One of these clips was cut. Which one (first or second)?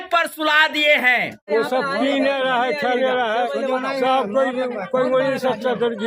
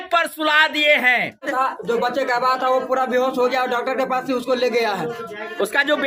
first